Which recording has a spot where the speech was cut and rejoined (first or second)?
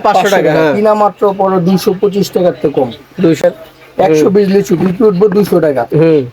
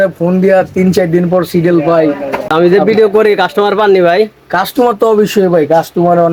first